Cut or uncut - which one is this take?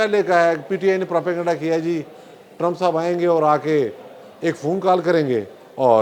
uncut